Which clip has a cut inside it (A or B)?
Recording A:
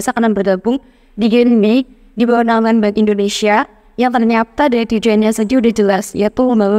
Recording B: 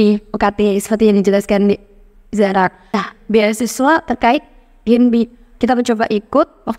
B